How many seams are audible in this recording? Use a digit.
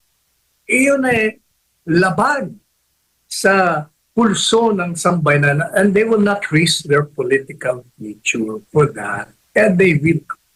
0